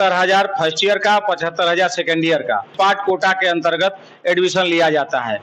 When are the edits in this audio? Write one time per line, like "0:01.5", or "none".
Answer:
0:02.7